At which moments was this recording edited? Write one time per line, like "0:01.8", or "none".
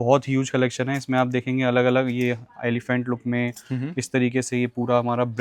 none

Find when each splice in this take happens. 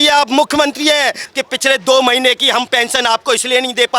0:01.2

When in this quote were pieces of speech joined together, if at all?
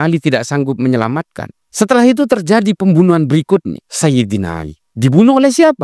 0:01.7

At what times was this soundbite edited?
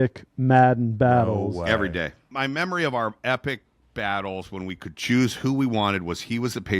0:02.3

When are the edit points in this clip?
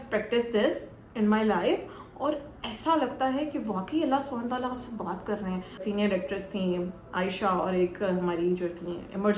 0:05.8

